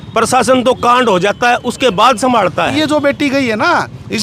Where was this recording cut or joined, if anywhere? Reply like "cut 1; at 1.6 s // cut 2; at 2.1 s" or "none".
cut 1; at 2.7 s